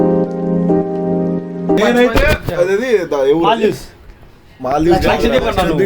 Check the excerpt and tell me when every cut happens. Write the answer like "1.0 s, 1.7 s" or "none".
1.8 s